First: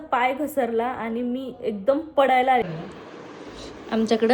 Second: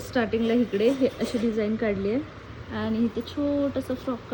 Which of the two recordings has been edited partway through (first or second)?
first